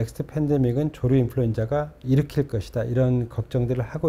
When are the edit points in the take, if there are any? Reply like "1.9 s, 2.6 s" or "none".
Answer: 2.0 s

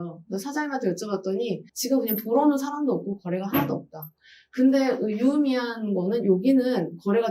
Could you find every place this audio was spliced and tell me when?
1.7 s

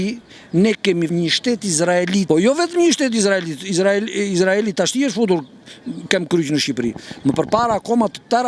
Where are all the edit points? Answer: 1.1 s, 2.2 s

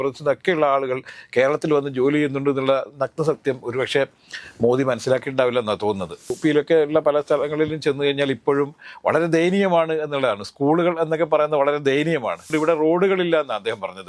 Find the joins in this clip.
6.3 s, 12.5 s

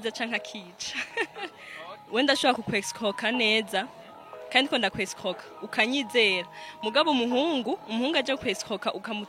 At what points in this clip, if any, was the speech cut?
2.0 s

